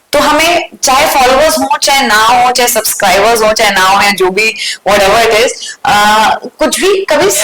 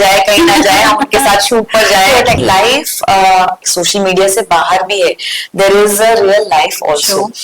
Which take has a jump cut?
second; 2 cuts; at 2.4 s, 3.7 s

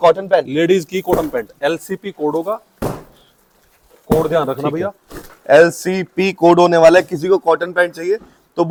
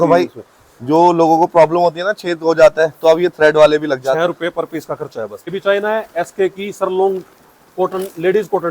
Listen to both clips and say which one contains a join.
second; 1 cut; at 5.5 s

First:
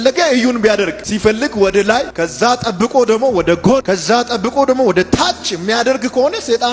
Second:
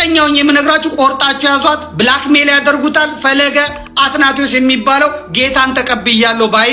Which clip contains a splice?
first; 3 cuts; at 1.0 s, 2.1 s, 3.8 s

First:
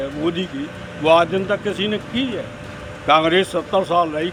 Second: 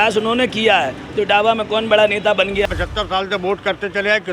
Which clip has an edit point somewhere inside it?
second; 1 cut; at 2.7 s

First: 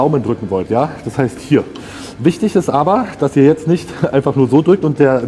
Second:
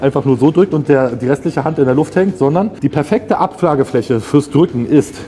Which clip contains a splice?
second; 1 cut; at 2.7 s

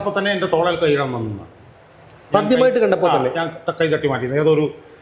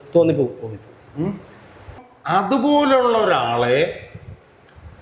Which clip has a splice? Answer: second; 1 cut; at 2.1 s

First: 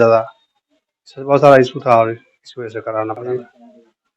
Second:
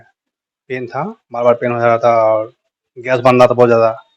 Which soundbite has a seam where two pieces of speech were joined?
first; 1 cut; at 3.2 s

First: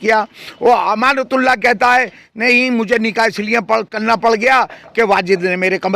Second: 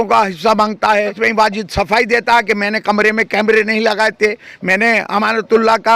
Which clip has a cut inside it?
second; 1 cut; at 1.0 s

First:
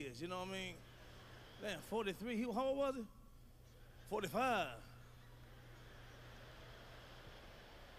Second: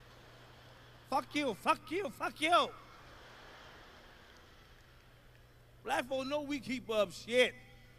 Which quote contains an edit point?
second; 1 cut; at 4.3 s

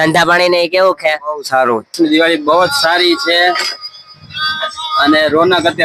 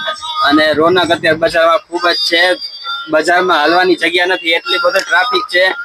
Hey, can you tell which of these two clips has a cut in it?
first; 1 cut; at 1.9 s

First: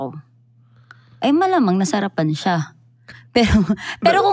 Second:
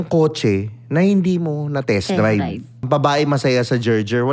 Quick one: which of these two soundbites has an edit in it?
second; 1 cut; at 2.8 s

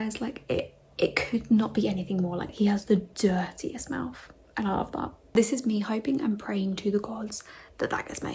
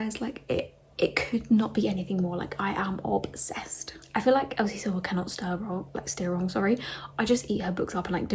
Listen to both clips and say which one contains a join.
first; 2 cuts; at 2.4 s, 5.3 s

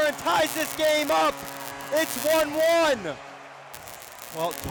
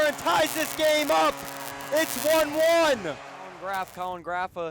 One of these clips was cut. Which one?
second; 1 cut; at 3.5 s

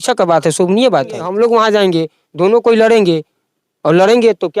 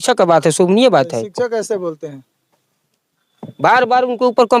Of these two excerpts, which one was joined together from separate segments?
first; 1 cut; at 1.3 s

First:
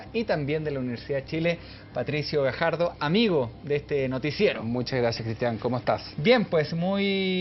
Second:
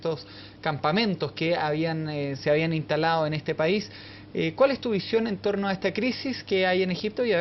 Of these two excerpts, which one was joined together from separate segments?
second; 1 cut; at 1.2 s

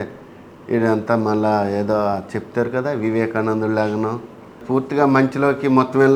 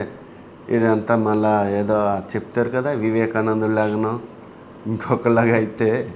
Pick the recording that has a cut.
first; 1 cut; at 4.6 s

